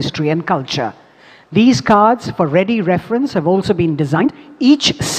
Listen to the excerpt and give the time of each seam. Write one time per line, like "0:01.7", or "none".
0:04.2